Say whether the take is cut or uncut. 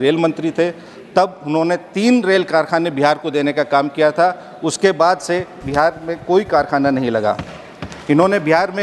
uncut